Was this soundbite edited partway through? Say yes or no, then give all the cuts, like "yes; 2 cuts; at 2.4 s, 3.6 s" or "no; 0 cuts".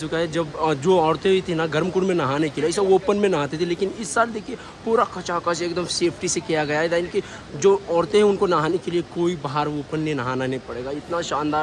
no; 0 cuts